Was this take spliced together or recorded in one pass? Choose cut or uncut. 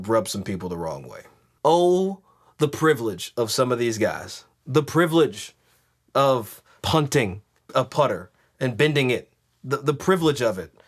cut